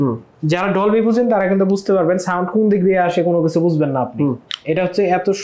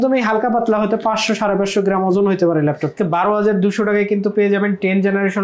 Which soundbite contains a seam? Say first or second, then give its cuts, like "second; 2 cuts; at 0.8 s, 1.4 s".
second; 1 cut; at 2.9 s